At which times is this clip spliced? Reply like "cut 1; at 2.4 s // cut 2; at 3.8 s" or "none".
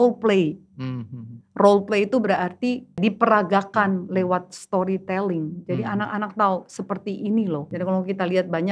cut 1; at 3.0 s // cut 2; at 7.7 s